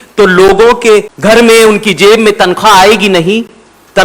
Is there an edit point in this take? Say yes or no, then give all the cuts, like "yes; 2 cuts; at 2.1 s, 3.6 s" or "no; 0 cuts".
yes; 1 cut; at 1.1 s